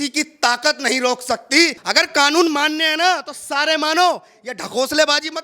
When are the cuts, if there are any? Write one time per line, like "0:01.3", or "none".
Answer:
0:01.8